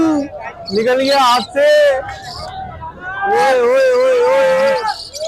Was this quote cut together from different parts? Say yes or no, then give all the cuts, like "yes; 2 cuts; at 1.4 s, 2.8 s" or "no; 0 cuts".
no; 0 cuts